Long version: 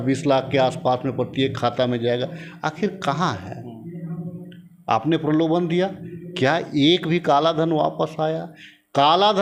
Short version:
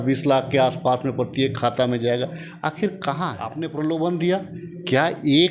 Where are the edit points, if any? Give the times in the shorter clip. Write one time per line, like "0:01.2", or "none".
0:03.5